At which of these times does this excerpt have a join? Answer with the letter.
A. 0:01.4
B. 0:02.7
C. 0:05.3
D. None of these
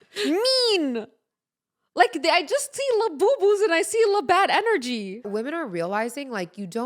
C